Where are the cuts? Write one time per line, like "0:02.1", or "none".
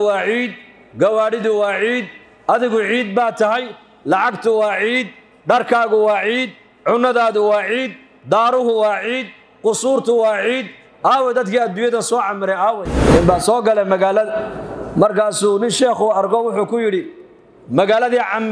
0:13.0